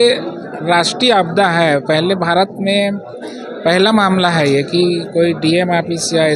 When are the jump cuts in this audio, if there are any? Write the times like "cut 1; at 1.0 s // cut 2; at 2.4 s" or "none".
none